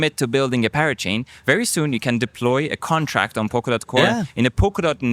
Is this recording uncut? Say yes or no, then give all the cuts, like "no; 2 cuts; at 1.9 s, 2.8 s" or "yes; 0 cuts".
no; 1 cut; at 4.0 s